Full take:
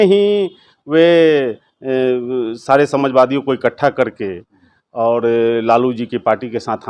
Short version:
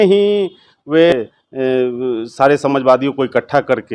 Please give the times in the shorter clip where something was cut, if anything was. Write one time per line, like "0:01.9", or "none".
0:01.1